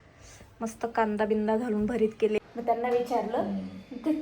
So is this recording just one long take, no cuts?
no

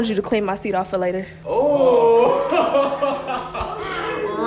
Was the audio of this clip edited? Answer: yes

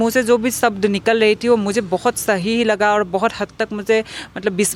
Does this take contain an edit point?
no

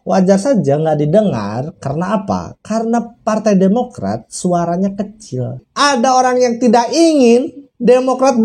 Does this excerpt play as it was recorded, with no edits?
no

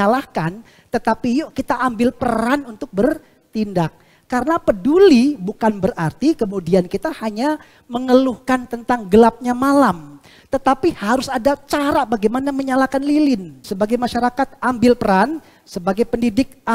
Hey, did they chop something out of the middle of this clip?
yes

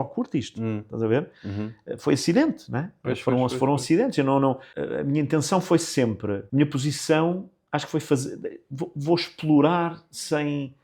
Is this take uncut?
no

